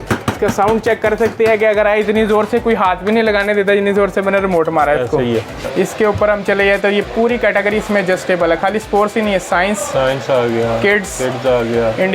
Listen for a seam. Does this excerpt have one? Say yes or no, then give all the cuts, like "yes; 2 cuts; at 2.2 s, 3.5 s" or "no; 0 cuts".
yes; 1 cut; at 5.7 s